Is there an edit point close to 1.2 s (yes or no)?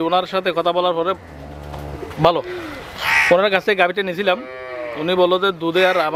no